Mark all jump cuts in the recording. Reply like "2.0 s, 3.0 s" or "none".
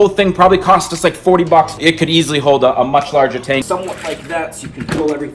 1.7 s, 3.6 s